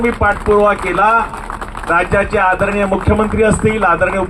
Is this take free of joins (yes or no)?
yes